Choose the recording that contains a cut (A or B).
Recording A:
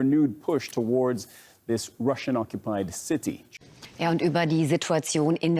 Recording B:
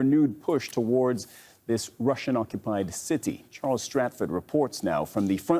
A